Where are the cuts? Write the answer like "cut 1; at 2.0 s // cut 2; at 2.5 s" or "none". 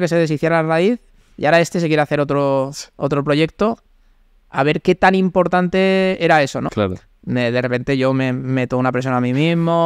cut 1; at 6.7 s